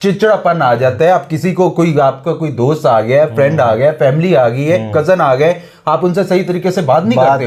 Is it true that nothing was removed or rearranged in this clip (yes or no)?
yes